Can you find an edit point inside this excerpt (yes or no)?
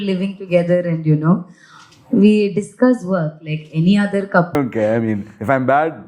yes